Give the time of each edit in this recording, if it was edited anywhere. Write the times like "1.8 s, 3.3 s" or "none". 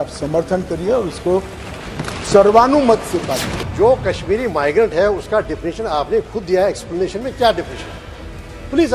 3.6 s